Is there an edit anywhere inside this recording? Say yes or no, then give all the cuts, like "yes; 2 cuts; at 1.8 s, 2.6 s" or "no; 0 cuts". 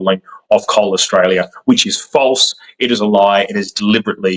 no; 0 cuts